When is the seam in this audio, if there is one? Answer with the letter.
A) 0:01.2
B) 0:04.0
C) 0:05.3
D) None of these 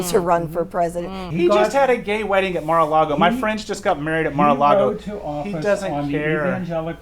A